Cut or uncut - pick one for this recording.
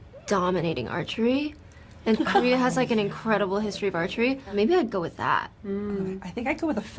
uncut